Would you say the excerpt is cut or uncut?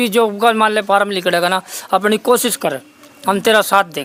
uncut